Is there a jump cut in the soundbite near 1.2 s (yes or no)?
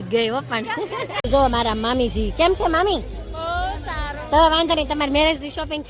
yes